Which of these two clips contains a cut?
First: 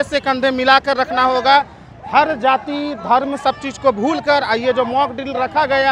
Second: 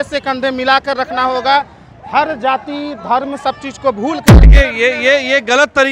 second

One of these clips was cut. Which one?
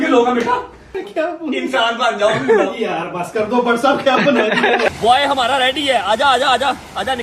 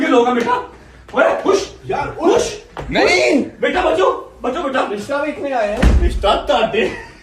first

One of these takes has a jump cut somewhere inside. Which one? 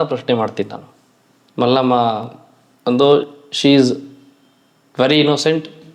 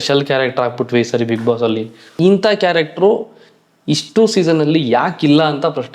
second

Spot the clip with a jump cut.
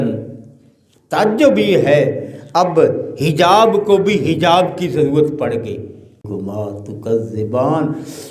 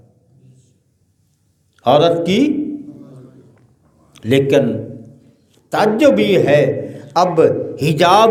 first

